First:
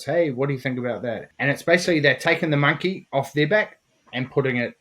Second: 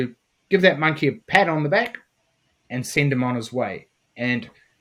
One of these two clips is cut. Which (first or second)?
first